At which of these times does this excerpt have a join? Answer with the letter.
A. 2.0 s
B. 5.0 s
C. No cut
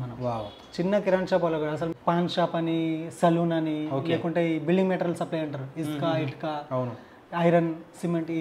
A